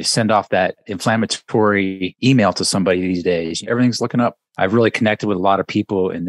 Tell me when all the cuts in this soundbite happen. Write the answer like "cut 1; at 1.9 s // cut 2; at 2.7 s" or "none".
cut 1; at 0.9 s // cut 2; at 2.1 s // cut 3; at 3.6 s // cut 4; at 4.4 s